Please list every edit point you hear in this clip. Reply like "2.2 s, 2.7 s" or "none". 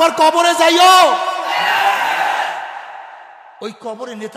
none